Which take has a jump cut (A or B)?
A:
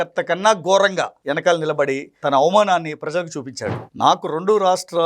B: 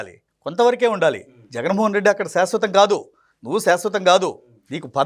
A